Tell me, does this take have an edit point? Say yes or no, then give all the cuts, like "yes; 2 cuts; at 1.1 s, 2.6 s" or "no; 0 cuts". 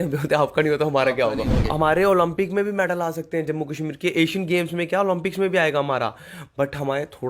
yes; 1 cut; at 1.6 s